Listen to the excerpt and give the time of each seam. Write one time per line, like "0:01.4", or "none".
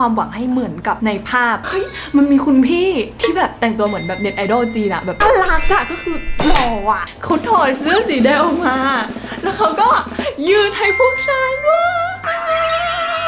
0:01.6
0:05.2
0:07.0